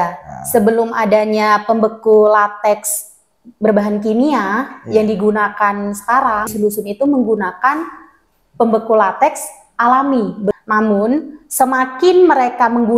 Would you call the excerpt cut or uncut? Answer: cut